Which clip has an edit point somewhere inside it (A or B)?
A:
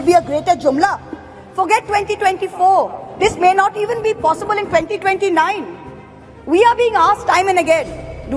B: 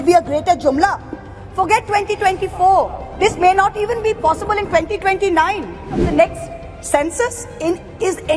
B